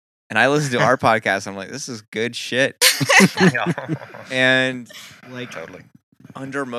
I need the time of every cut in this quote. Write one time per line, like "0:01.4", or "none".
none